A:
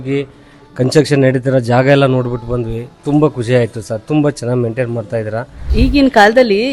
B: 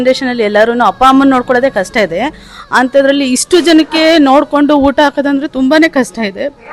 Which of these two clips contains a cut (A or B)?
A